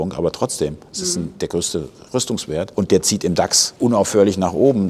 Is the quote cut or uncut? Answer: cut